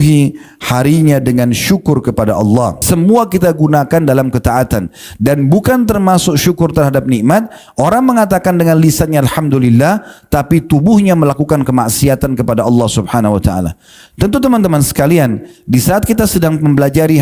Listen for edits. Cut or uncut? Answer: cut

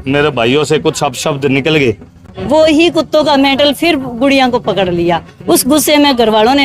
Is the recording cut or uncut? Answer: cut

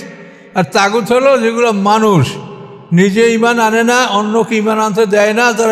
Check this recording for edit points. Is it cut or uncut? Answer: uncut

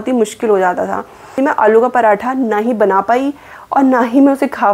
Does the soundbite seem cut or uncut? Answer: cut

